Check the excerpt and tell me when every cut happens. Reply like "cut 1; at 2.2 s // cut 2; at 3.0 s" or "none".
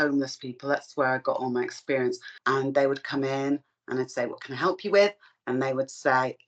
cut 1; at 2.3 s